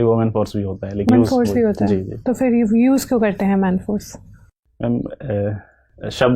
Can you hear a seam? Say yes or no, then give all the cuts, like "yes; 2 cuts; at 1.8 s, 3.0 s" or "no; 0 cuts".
yes; 1 cut; at 1.1 s